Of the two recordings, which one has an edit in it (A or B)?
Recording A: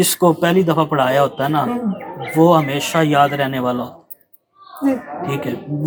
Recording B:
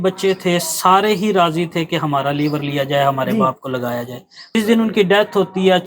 B